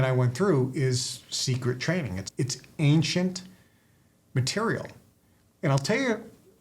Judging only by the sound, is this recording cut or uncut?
cut